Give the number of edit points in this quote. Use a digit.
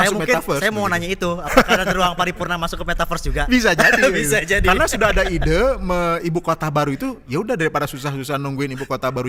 0